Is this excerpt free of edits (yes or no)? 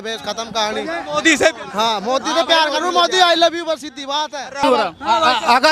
no